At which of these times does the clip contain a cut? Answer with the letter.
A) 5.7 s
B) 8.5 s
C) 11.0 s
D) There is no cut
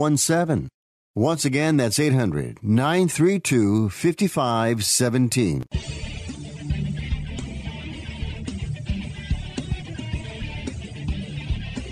A